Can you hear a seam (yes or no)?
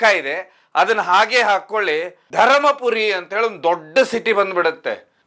yes